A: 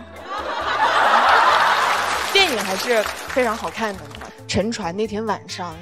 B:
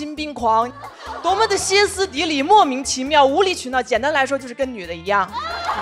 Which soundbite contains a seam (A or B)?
A